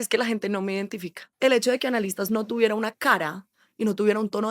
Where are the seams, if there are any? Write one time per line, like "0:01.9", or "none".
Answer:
0:01.2